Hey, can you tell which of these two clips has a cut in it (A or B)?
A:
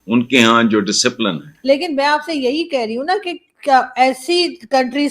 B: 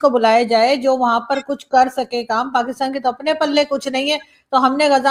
A